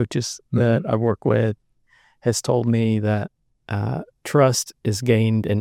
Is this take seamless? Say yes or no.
yes